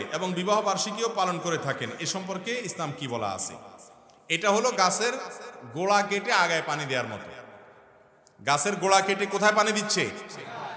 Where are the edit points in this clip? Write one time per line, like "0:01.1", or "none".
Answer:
none